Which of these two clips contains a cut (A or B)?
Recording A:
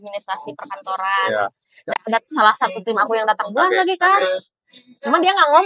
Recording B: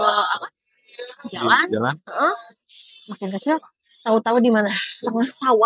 A